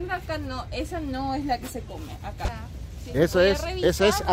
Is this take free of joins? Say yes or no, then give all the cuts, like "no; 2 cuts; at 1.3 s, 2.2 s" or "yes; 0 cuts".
no; 1 cut; at 2.5 s